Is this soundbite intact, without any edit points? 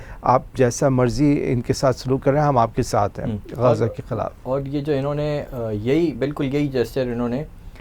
yes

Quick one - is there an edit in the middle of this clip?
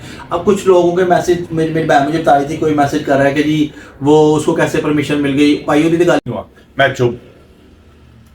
yes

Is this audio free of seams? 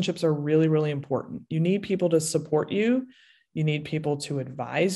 yes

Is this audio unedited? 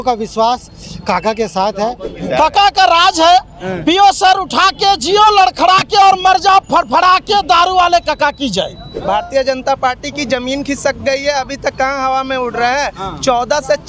no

